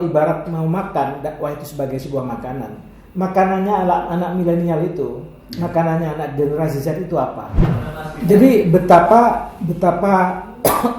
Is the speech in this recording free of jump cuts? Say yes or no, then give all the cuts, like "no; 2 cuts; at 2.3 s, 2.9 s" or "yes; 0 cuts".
no; 1 cut; at 7.7 s